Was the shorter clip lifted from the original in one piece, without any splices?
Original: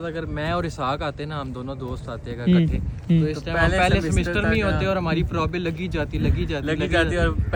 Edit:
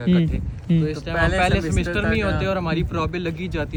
yes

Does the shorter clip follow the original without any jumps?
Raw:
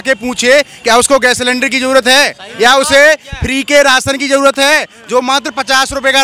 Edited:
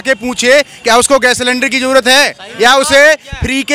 yes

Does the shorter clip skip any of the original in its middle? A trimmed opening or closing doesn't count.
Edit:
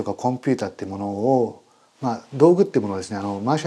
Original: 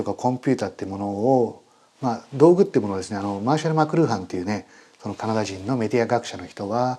no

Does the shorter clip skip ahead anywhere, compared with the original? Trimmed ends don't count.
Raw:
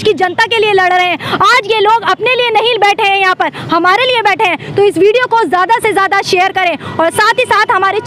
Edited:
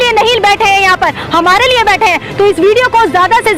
no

